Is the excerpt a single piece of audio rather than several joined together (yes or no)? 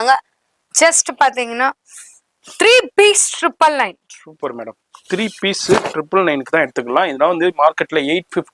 yes